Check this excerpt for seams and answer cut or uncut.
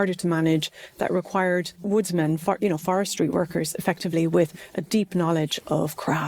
uncut